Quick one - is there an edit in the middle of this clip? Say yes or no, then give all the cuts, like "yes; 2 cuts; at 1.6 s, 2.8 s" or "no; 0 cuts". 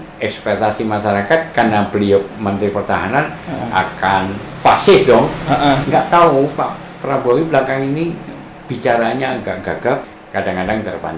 yes; 2 cuts; at 5.8 s, 10.1 s